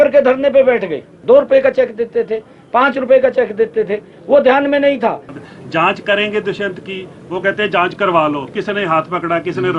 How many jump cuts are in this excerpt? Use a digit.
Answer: 2